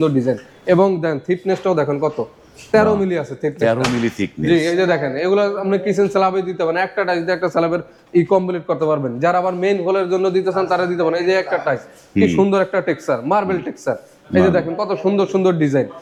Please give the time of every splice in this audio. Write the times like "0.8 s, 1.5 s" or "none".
none